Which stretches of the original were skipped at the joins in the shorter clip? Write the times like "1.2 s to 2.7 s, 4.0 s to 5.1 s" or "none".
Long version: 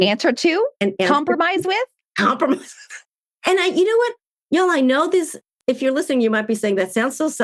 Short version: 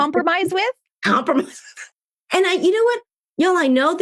none